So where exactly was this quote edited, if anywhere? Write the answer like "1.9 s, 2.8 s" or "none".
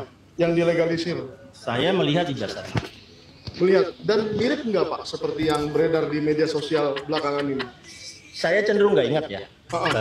none